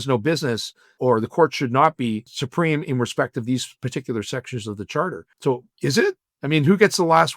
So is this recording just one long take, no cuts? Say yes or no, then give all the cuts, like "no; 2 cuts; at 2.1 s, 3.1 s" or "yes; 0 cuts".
no; 3 cuts; at 0.9 s, 2.4 s, 5.6 s